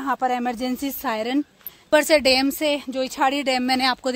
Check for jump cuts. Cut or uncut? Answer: cut